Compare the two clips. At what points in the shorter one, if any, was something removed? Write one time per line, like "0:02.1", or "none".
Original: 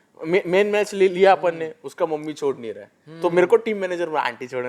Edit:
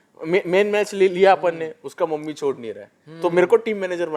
none